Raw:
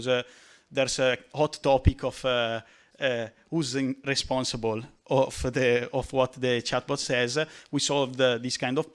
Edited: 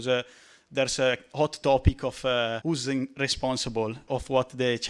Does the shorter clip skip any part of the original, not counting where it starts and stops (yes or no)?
yes